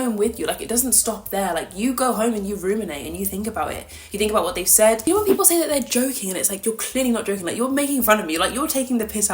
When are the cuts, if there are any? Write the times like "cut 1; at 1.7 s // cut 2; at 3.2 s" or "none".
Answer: cut 1; at 5.0 s